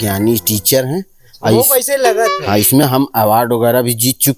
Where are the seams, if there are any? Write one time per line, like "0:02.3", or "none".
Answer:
none